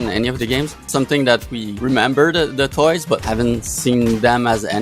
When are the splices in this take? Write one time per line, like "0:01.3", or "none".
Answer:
0:00.8
0:01.6
0:03.2

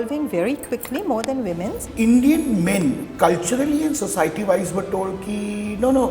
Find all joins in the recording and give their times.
0:01.9

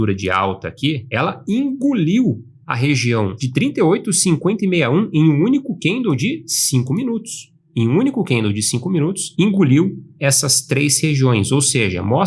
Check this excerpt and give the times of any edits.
0:01.0
0:03.4

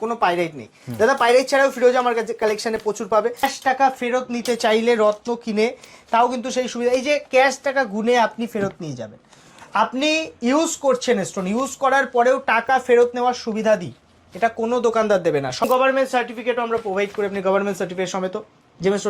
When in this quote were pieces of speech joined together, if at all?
0:03.4
0:15.6

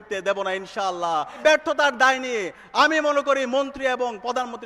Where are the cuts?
0:01.4

